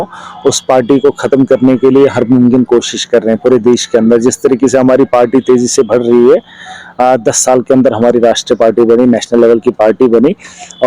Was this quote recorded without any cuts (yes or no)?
yes